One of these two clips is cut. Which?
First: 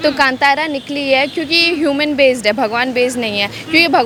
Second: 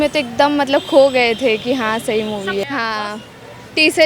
second; 1 cut; at 2.6 s

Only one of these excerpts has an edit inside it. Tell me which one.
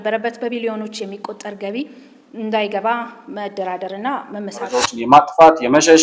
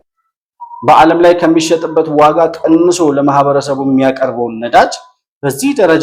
first; 1 cut; at 4.9 s

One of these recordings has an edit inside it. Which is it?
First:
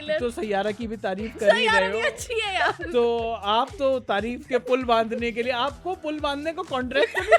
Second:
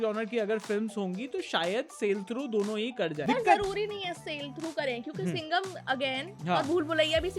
second; 1 cut; at 3.2 s

